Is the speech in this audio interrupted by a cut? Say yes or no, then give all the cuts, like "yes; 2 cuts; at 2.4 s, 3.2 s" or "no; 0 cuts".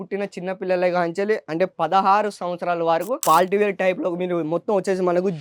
yes; 1 cut; at 3.2 s